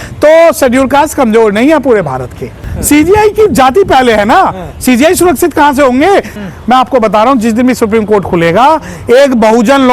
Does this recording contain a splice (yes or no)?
yes